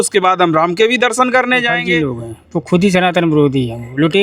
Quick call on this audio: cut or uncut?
cut